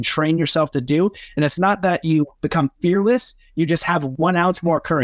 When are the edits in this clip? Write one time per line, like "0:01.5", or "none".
0:04.1